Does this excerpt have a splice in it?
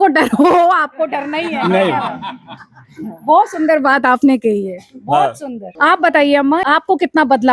yes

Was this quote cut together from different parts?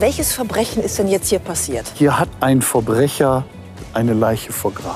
yes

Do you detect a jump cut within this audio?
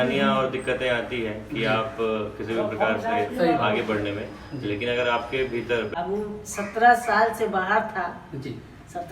yes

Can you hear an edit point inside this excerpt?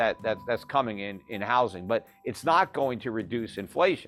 no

